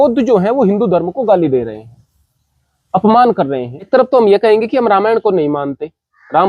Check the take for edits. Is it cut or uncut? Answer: cut